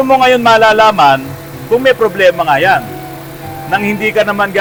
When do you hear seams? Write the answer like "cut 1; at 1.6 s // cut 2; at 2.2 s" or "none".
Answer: none